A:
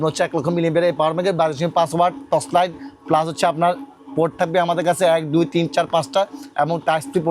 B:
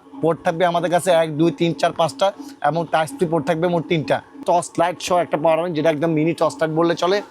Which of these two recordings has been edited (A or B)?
B